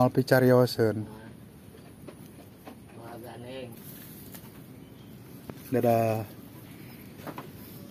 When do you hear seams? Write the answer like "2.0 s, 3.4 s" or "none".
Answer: 3.8 s